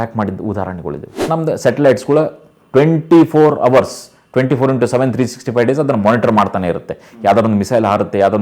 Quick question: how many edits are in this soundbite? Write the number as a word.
one